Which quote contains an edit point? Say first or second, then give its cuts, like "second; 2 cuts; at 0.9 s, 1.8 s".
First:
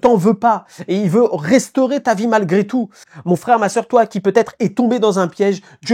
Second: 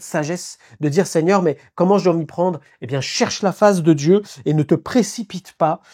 first; 1 cut; at 3.0 s